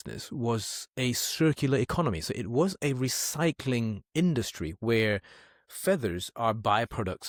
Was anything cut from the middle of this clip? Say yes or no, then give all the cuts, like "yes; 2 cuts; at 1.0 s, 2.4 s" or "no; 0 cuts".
no; 0 cuts